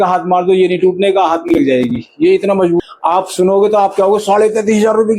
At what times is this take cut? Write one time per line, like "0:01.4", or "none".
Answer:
0:02.8

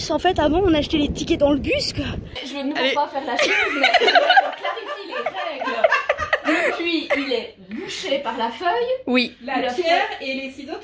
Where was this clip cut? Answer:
0:02.4

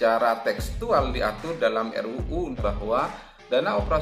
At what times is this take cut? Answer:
0:02.5

